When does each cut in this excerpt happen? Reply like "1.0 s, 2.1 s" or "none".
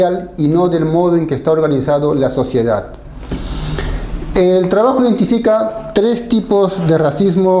none